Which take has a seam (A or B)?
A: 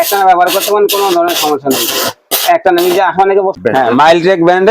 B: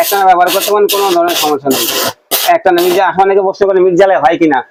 A